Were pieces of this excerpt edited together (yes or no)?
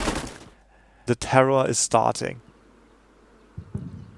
yes